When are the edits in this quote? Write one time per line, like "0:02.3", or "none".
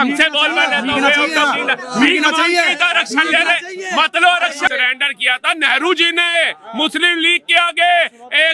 0:04.7

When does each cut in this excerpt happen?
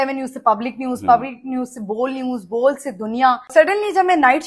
0:03.5

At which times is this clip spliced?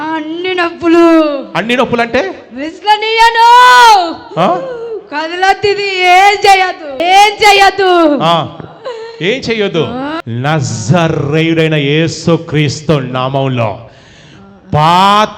0:07.0
0:10.2

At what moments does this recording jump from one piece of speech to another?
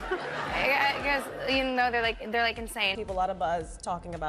0:03.0

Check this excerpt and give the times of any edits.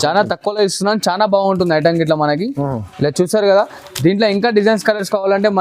none

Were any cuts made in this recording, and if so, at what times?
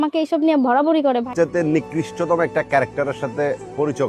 0:01.3

